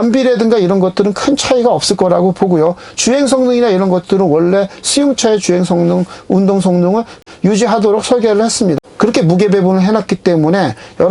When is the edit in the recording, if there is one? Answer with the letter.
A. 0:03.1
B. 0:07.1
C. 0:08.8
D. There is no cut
C